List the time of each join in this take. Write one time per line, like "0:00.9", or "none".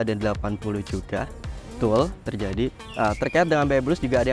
0:02.8